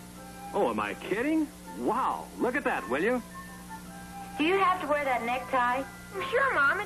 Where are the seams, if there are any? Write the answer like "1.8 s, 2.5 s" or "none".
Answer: 5.1 s